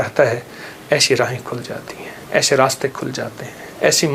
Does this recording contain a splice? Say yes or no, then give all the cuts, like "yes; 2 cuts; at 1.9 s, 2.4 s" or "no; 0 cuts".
no; 0 cuts